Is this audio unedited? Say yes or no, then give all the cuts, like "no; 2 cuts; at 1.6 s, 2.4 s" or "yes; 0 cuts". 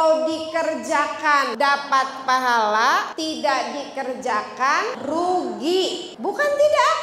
no; 4 cuts; at 1.5 s, 3.1 s, 5.0 s, 6.1 s